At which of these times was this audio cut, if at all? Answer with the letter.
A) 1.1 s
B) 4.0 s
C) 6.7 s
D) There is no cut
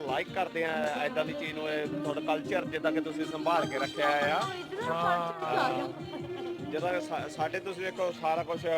D